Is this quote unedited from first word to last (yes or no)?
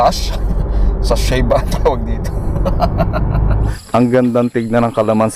no